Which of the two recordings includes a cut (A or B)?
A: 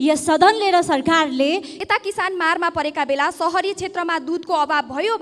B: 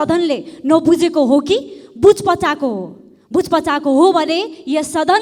A